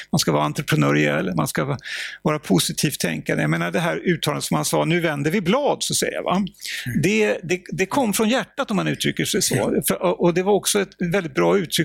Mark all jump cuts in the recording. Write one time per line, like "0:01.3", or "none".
none

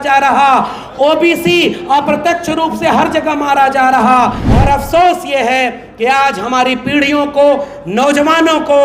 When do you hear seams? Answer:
0:04.5

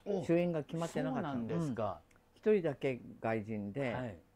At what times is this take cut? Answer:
none

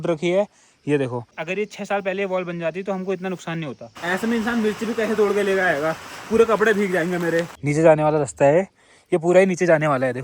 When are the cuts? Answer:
0:01.3
0:03.9
0:07.5

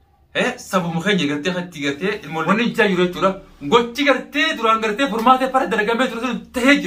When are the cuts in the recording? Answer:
0:02.4

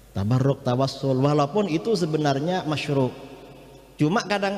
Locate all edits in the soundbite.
none

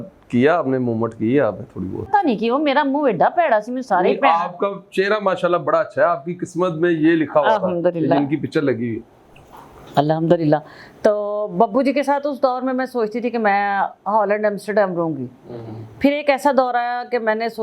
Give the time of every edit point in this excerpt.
0:02.1

